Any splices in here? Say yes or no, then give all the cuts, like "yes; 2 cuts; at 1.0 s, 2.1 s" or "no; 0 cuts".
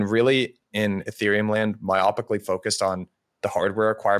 no; 0 cuts